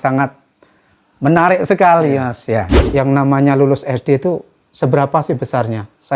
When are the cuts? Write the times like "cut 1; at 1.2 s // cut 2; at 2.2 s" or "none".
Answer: cut 1; at 2.8 s

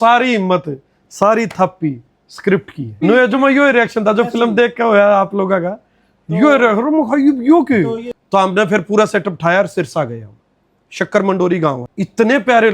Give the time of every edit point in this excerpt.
cut 1; at 3.0 s // cut 2; at 8.1 s // cut 3; at 11.9 s

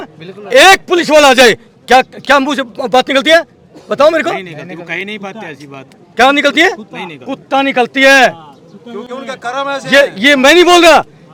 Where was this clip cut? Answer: none

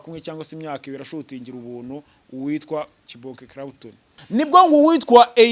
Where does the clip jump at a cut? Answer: cut 1; at 4.1 s

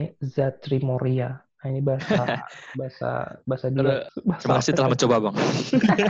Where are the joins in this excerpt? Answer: cut 1; at 4.1 s

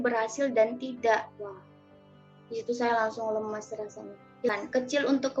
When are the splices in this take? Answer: cut 1; at 4.5 s

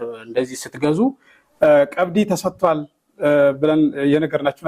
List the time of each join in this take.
cut 1; at 1.5 s

